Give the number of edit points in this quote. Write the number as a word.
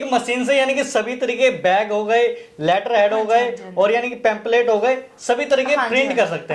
zero